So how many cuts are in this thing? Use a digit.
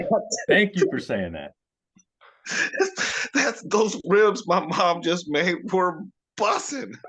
0